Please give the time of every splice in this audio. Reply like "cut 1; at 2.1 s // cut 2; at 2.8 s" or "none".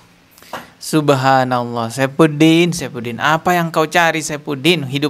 none